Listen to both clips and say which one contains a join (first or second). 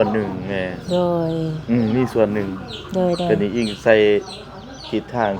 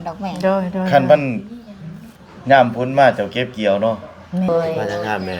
second